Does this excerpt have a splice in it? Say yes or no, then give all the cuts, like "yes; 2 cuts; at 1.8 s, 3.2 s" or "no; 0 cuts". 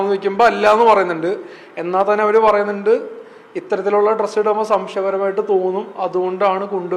no; 0 cuts